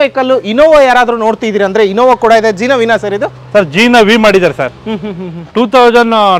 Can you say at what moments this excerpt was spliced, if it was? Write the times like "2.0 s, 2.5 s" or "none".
none